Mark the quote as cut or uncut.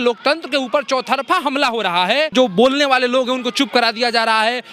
cut